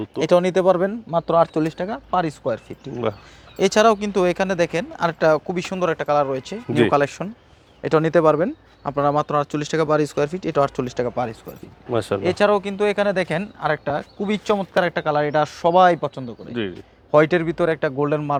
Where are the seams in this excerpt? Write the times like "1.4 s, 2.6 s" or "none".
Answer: none